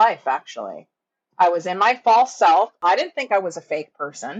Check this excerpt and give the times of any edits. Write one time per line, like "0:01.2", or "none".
0:02.7

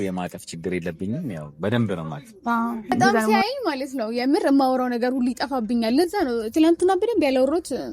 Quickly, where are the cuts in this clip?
0:03.3

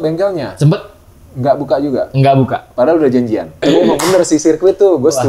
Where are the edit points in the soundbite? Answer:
0:03.5

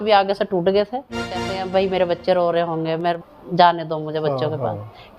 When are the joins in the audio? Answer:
0:01.6
0:03.2

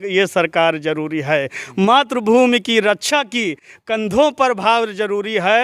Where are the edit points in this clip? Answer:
none

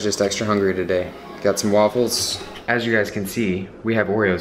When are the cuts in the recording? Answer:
0:02.4

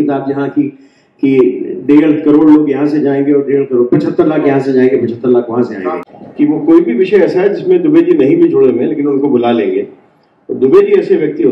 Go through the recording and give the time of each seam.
0:06.0

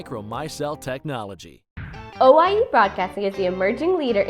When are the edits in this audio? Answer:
0:01.8

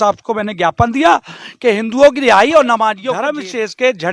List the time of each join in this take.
0:03.1

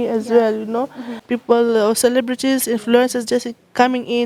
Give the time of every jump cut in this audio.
0:01.2

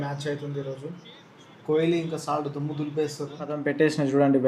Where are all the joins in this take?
0:03.4

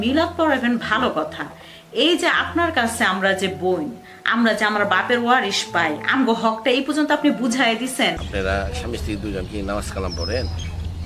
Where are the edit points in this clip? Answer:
0:08.2

